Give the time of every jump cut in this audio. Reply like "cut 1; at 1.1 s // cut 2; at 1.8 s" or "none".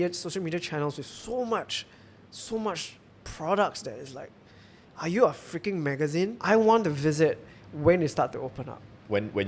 cut 1; at 6.4 s